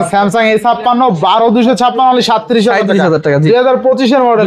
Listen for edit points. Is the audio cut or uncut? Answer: uncut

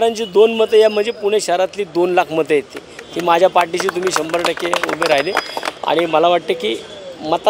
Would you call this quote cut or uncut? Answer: uncut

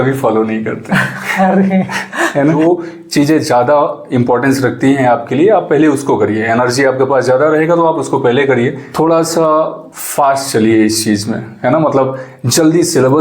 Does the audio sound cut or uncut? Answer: cut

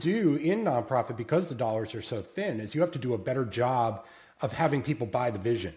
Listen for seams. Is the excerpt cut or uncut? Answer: uncut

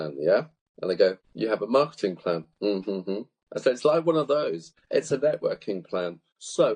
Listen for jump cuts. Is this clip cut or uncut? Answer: cut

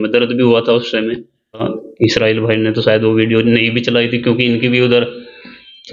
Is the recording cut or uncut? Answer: cut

